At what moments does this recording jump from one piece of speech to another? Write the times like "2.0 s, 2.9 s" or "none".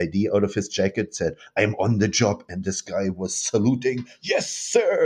none